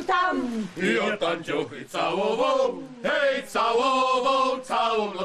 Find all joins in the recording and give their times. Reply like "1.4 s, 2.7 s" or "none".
none